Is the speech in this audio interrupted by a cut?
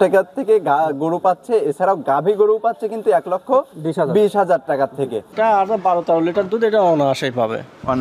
yes; 1 cut; at 5.3 s

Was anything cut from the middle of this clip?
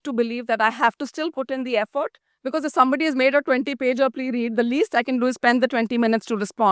no; 0 cuts

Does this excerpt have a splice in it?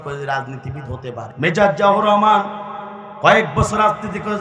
yes; 1 cut; at 1.3 s

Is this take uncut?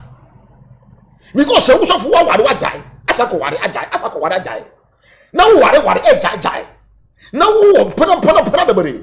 yes; 0 cuts

